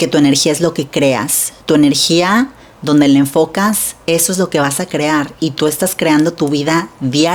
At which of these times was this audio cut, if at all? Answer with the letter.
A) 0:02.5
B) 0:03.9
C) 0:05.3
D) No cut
D